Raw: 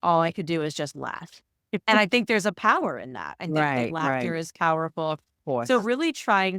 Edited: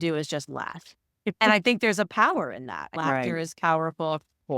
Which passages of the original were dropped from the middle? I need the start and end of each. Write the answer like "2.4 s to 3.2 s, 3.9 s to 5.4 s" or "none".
3.4 s to 3.9 s